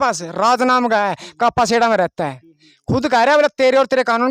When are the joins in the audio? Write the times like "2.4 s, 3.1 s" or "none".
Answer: none